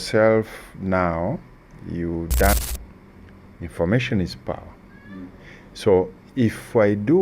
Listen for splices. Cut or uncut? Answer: cut